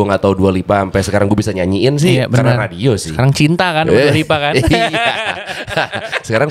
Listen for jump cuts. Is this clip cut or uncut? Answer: uncut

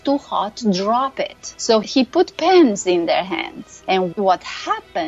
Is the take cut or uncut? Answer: cut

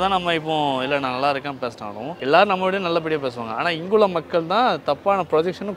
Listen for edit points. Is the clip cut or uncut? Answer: cut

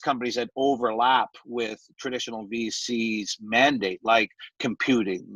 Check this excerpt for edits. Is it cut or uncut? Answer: uncut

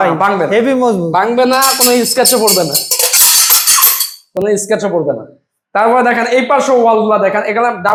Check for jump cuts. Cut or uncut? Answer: uncut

